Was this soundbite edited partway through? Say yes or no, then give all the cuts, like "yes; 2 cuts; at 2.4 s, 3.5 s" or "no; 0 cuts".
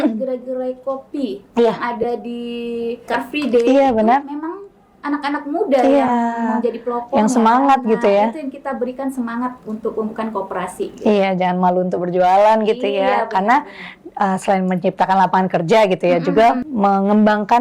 yes; 2 cuts; at 3.1 s, 16.7 s